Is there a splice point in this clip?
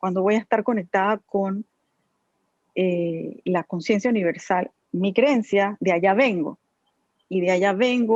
yes; 1 cut; at 4.7 s

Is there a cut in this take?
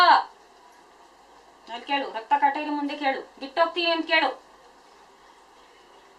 no; 0 cuts

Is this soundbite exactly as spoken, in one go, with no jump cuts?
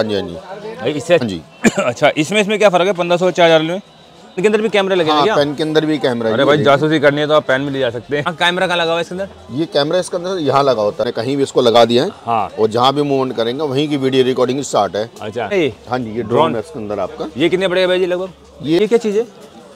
no; 6 cuts; at 1.2 s, 4.4 s, 8.3 s, 11.1 s, 15.5 s, 18.8 s

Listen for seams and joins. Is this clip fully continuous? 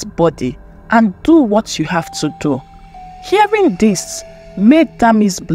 yes; 0 cuts

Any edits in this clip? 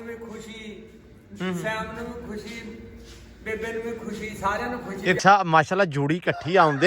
yes; 1 cut; at 5.2 s

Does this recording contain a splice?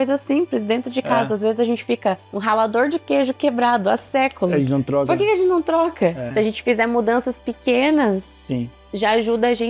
yes; 2 cuts; at 2.4 s, 6.2 s

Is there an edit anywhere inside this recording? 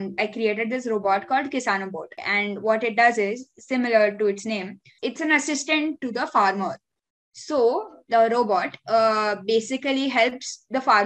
yes; 2 cuts; at 4.9 s, 6.0 s

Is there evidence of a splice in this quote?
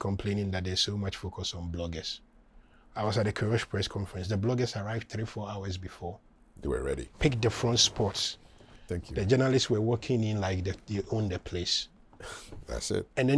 no; 0 cuts

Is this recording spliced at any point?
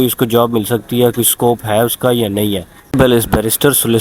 yes; 1 cut; at 2.9 s

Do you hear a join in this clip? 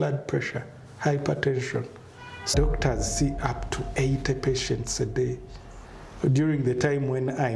yes; 1 cut; at 2.5 s

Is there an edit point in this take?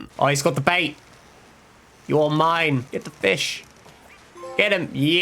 yes; 1 cut; at 2.9 s

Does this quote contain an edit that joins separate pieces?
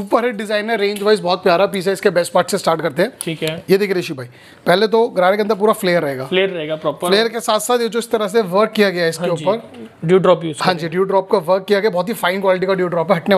no; 0 cuts

